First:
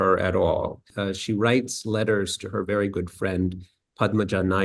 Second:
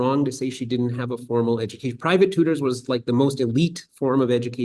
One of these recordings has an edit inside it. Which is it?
first; 1 cut; at 0.9 s

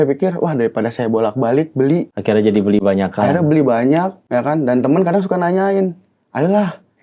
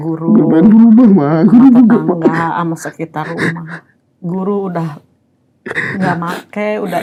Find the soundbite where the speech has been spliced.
first; 2 cuts; at 2.1 s, 4.2 s

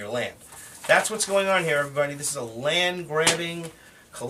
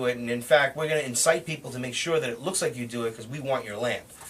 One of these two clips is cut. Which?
first; 1 cut; at 1.6 s

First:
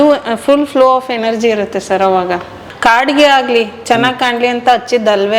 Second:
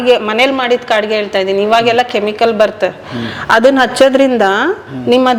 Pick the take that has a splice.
first; 1 cut; at 2.7 s

